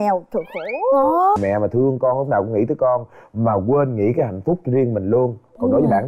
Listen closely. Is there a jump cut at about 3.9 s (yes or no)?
no